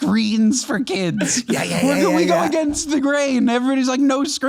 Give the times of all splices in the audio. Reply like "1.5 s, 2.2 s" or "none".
none